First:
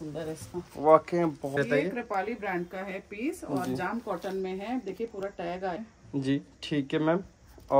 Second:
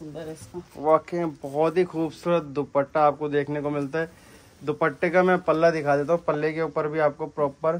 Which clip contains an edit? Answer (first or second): first